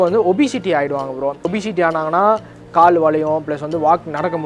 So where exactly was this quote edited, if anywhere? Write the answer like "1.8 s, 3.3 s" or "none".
1.4 s